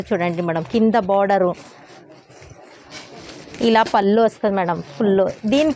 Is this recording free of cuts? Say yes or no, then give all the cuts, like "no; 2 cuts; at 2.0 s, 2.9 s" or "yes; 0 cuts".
yes; 0 cuts